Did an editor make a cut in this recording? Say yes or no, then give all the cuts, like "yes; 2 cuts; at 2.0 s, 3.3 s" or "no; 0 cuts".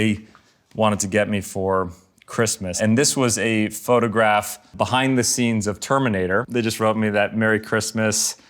yes; 1 cut; at 6.5 s